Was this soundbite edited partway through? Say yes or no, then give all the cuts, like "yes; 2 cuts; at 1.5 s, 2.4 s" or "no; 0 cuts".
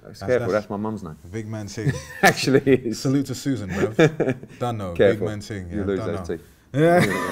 no; 0 cuts